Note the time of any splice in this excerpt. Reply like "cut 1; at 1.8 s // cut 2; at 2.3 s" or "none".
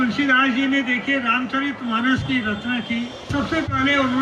cut 1; at 3.3 s